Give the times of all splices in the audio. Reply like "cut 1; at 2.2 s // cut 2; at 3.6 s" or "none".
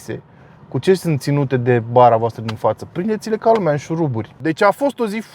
none